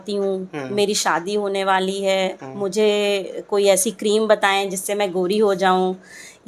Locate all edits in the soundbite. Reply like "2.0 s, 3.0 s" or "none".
none